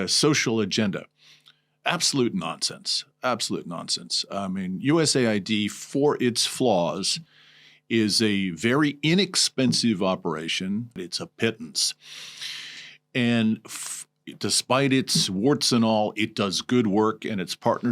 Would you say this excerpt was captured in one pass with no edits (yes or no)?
no